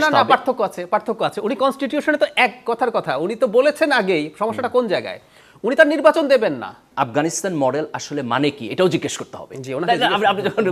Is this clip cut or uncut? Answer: cut